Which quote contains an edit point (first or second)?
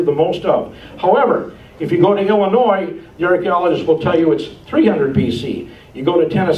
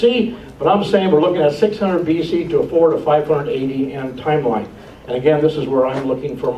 first